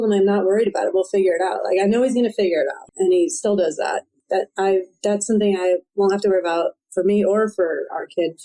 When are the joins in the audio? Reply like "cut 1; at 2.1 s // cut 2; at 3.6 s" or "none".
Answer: cut 1; at 2.8 s // cut 2; at 4.1 s